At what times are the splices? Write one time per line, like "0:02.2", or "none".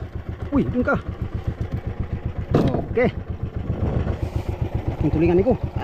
0:04.0